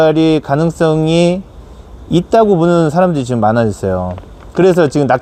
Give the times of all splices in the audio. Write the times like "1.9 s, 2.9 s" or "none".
none